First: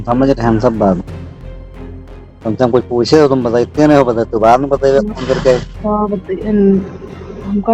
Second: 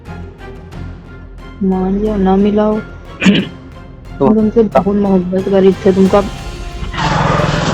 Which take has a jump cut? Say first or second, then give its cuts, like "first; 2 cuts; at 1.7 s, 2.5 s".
second; 1 cut; at 1.5 s